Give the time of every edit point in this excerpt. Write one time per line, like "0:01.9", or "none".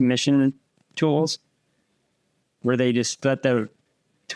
none